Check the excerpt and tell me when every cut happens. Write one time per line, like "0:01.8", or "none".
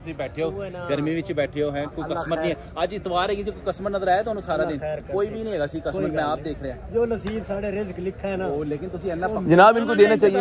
none